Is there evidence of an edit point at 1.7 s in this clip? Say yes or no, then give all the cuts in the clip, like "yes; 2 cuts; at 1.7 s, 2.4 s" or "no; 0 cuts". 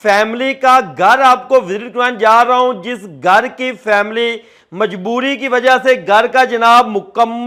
no; 0 cuts